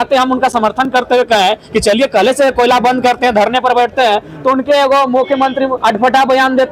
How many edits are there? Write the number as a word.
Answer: one